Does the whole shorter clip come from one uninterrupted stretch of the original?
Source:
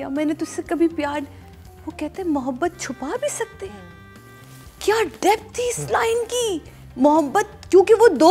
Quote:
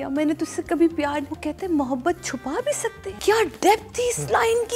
no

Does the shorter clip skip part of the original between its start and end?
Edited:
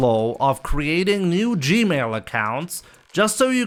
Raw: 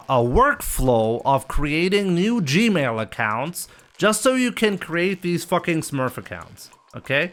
no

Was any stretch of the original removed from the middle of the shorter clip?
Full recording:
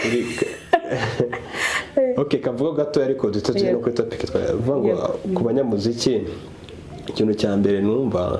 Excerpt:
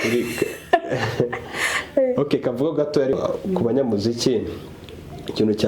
yes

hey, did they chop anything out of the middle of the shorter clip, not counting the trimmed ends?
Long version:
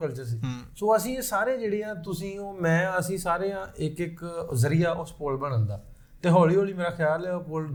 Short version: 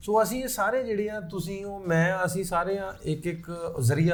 no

